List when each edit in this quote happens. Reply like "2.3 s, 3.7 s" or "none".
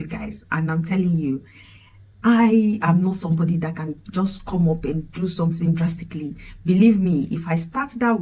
none